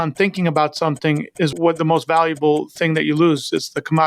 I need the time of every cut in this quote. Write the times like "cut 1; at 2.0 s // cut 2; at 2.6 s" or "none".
cut 1; at 1.5 s